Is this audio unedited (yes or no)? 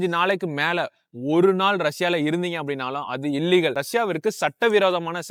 yes